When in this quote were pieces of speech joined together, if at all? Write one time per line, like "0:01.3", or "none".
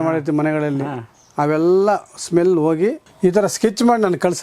0:03.1